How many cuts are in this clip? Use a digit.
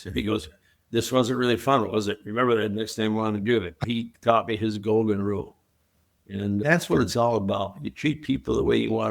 2